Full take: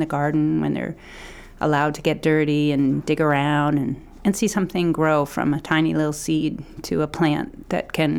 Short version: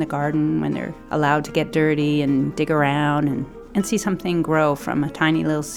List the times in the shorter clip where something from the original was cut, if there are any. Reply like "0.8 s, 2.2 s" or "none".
0.9 s